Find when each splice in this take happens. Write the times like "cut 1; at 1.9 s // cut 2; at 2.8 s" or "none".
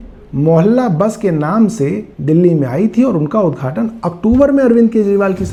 none